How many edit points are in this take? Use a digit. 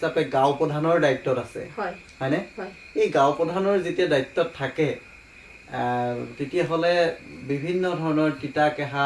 0